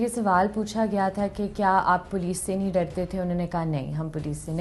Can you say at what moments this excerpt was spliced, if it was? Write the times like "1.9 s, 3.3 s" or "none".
none